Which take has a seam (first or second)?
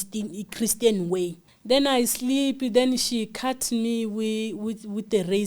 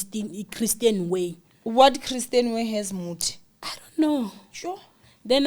first